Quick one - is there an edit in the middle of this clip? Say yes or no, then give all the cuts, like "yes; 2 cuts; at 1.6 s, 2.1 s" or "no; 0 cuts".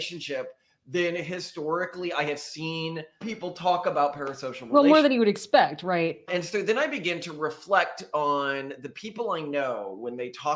yes; 2 cuts; at 3.3 s, 6.2 s